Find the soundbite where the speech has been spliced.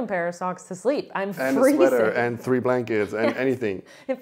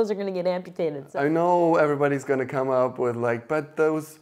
second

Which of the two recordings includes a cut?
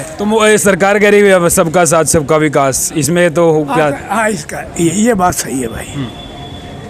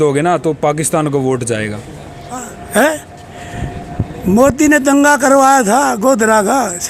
second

